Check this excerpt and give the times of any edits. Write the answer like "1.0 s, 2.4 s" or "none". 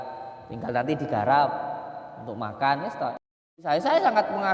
3.6 s